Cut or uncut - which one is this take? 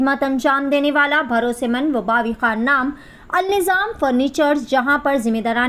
uncut